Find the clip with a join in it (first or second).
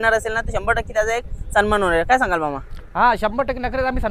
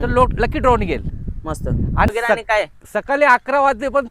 second